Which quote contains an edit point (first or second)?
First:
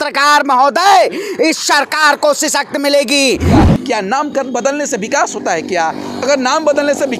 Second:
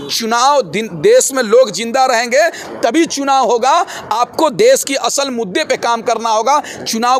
first